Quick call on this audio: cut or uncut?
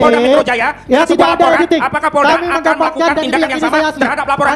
uncut